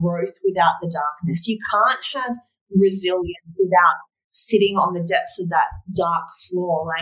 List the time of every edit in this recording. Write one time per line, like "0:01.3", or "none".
none

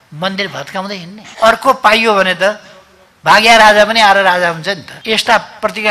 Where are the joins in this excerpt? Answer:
0:01.2
0:04.9

